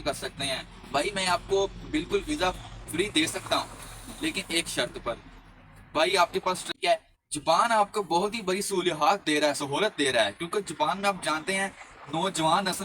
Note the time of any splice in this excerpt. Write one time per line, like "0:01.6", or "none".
0:06.7

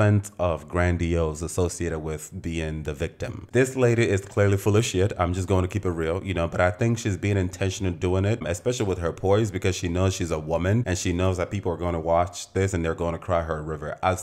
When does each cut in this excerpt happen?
0:03.4

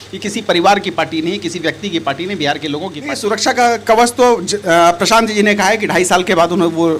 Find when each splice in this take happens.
0:03.0

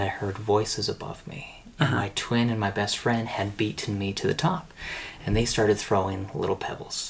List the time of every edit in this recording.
none

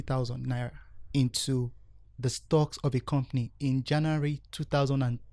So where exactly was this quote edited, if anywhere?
none

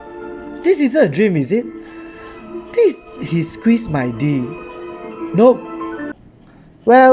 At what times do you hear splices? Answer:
0:06.2

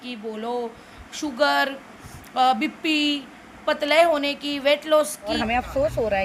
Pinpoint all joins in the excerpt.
0:05.3

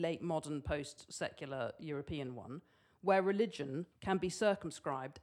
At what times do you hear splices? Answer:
0:03.9

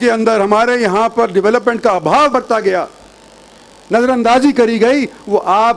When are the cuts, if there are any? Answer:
none

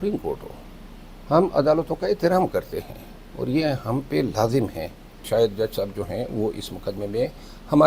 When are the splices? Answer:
0:05.1

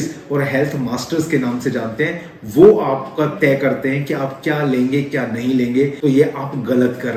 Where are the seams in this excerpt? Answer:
none

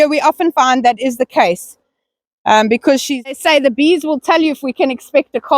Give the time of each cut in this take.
0:03.4

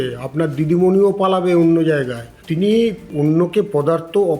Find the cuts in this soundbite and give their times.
0:02.4
0:03.0

